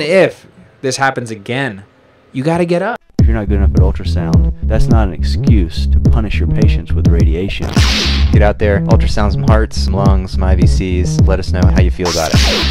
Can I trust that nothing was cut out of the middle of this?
no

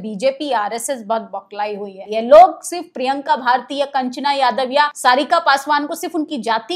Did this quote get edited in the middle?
yes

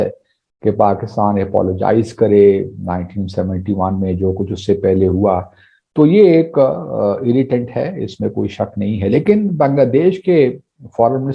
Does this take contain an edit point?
no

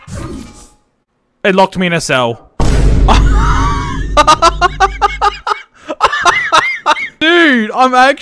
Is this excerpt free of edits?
no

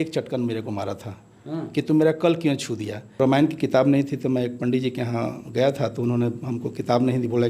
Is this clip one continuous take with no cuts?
no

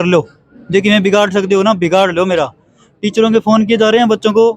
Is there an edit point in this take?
no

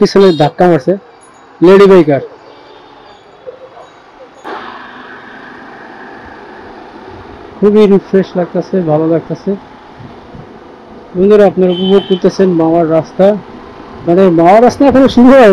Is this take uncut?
yes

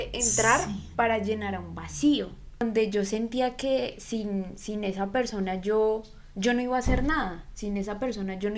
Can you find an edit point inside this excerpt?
yes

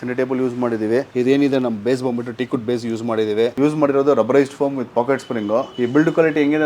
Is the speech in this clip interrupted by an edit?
yes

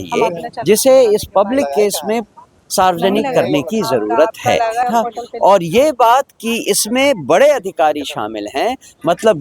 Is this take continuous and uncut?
no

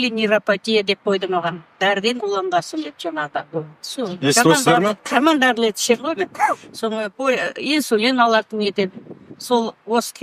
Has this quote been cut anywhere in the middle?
no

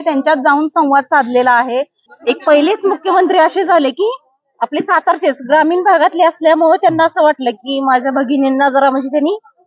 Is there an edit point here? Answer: yes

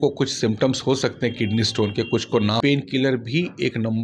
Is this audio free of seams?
no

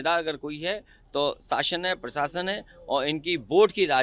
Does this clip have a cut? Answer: no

